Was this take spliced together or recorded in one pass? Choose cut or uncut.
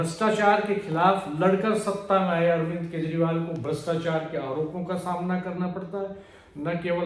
uncut